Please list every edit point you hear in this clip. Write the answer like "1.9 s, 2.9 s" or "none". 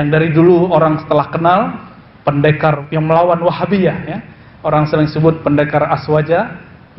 2.8 s